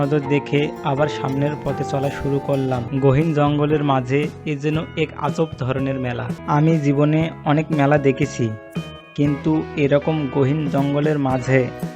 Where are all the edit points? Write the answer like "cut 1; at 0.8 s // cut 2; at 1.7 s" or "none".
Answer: cut 1; at 2.9 s // cut 2; at 6.4 s